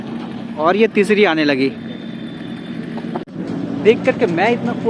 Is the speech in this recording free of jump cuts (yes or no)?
yes